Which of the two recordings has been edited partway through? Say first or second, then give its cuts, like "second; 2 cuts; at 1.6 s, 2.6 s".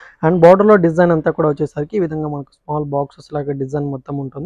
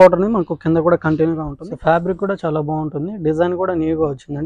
second; 1 cut; at 1.5 s